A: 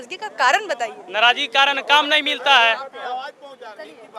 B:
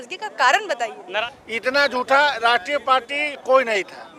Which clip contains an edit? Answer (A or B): B